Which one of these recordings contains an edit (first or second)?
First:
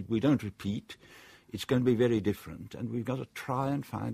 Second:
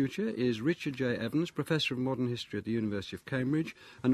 first